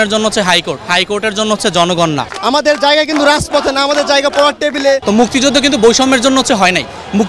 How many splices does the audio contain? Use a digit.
2